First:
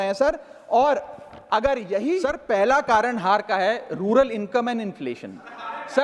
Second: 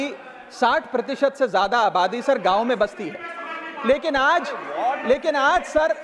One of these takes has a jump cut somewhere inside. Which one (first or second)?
first